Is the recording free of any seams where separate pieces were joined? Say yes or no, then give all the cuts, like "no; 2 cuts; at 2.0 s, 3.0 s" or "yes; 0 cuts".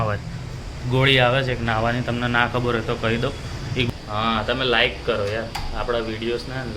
no; 1 cut; at 3.9 s